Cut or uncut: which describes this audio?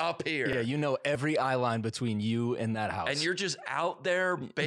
uncut